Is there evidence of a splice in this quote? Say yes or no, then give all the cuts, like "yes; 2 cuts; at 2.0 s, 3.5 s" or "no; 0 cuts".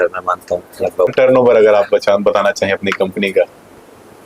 yes; 1 cut; at 1.1 s